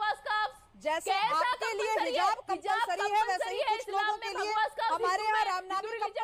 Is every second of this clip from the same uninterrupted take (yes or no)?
yes